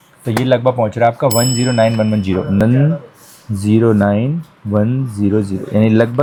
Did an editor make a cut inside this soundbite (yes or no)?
no